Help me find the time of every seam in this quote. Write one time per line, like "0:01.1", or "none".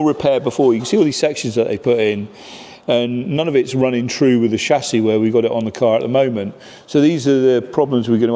none